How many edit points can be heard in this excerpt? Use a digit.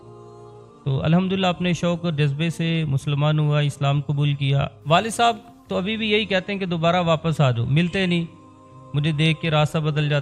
1